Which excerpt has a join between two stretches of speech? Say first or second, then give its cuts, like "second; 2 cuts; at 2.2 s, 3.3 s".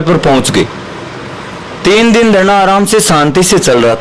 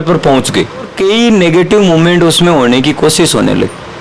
second; 1 cut; at 0.9 s